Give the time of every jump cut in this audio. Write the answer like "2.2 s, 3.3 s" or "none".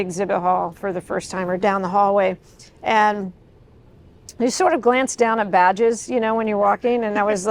none